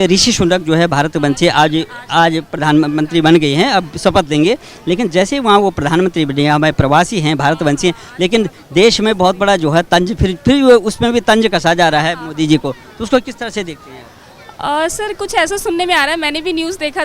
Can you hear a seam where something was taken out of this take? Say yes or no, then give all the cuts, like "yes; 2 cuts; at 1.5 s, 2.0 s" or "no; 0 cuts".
no; 0 cuts